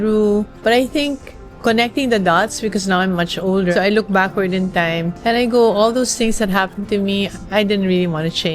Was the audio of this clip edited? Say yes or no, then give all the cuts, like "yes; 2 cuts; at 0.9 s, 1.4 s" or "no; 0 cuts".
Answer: yes; 1 cut; at 3.7 s